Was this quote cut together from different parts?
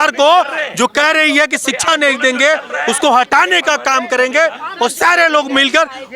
no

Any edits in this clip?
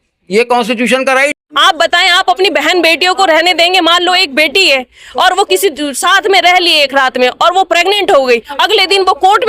yes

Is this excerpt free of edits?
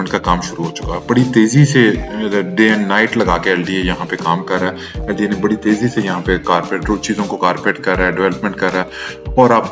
yes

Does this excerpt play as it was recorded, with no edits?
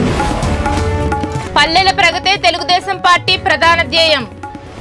yes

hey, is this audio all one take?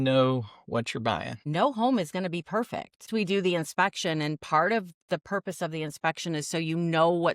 no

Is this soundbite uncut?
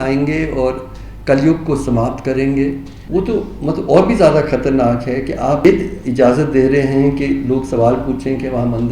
no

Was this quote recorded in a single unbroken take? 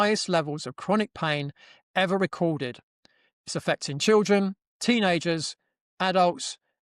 yes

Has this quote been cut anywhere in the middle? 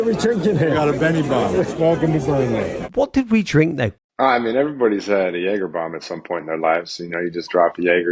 yes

